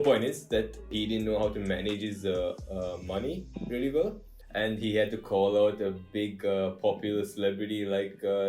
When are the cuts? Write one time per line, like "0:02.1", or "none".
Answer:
0:00.9